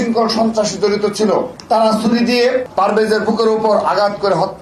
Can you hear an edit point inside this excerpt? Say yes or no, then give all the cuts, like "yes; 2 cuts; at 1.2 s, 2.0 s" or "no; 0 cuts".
yes; 2 cuts; at 1.5 s, 2.7 s